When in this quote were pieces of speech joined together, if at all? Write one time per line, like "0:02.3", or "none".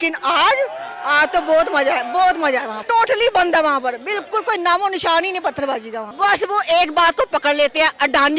0:02.8
0:06.0